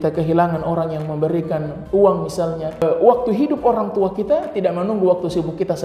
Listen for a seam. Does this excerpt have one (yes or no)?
yes